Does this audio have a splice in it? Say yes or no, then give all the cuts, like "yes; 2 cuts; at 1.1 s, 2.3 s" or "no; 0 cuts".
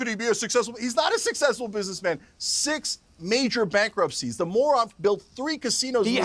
no; 0 cuts